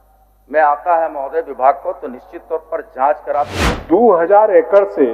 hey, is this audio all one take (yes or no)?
no